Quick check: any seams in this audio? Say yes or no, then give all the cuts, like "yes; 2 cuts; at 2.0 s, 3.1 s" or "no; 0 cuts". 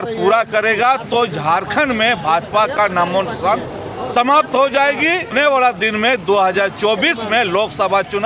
yes; 1 cut; at 5.3 s